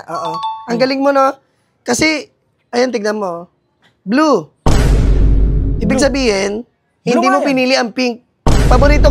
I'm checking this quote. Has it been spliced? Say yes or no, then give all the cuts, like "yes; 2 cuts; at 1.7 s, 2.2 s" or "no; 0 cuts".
no; 0 cuts